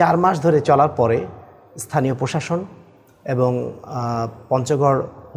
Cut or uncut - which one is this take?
uncut